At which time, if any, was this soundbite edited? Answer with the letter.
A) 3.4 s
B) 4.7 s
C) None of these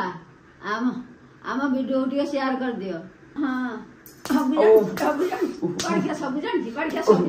A